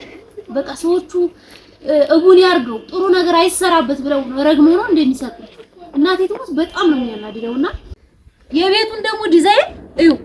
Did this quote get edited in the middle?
yes; 1 cut; at 7.9 s

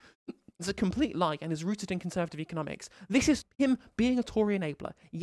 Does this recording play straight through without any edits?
no; 1 cut; at 3.5 s

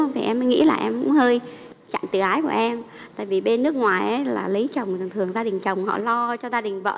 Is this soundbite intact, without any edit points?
yes; 0 cuts

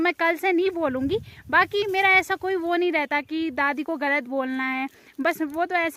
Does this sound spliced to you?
no; 0 cuts

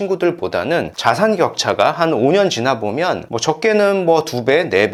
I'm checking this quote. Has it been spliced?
no; 0 cuts

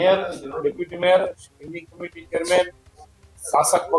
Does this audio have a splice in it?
no; 0 cuts

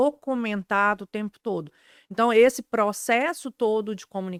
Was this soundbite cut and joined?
no; 0 cuts

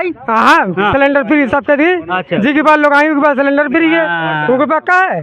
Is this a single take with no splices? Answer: yes; 0 cuts

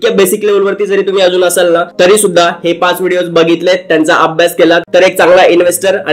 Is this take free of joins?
no; 1 cut; at 4.9 s

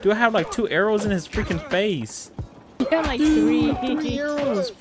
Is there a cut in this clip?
yes; 1 cut; at 2.8 s

